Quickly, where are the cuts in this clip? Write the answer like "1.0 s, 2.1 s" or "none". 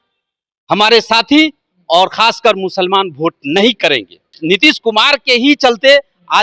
4.4 s